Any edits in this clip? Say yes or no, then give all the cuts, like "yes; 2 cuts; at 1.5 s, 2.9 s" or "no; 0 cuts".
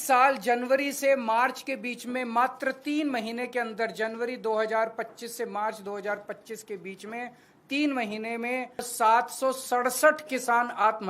yes; 1 cut; at 8.9 s